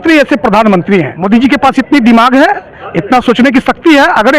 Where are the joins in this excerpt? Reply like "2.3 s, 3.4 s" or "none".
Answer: 1.1 s